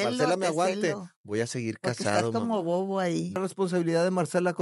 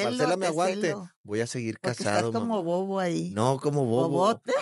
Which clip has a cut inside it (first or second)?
first